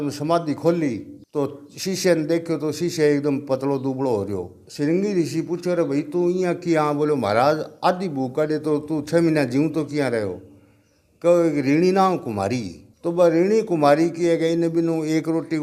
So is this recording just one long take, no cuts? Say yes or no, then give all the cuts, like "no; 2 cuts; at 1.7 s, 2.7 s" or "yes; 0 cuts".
yes; 0 cuts